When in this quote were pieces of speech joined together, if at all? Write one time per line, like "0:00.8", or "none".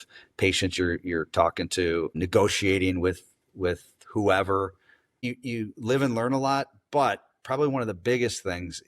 0:02.1
0:05.2